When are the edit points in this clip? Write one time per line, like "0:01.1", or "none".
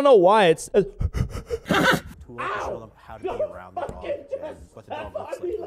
0:02.1